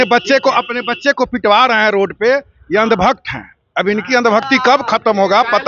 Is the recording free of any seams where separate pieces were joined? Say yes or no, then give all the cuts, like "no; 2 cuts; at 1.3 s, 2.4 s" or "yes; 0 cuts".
yes; 0 cuts